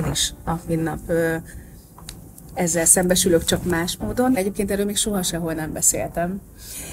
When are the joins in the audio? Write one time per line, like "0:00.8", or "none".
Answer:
0:04.4